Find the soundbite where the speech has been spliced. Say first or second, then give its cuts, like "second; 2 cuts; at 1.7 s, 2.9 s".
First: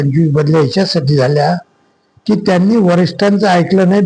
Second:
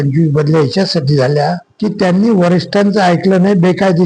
second; 1 cut; at 1.7 s